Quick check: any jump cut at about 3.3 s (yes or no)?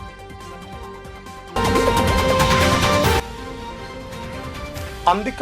no